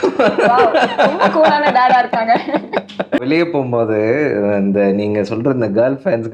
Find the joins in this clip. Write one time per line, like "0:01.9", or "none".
0:03.2